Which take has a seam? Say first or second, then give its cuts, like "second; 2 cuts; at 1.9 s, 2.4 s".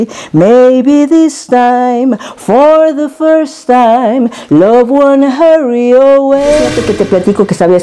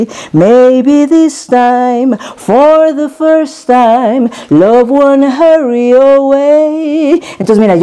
first; 1 cut; at 6.8 s